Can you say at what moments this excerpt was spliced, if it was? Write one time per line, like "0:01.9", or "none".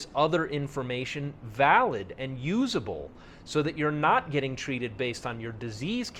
none